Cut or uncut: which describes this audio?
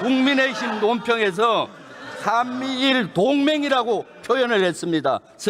uncut